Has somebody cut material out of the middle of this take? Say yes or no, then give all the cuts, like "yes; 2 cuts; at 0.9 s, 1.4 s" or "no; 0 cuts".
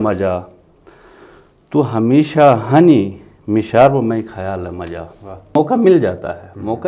yes; 1 cut; at 5.6 s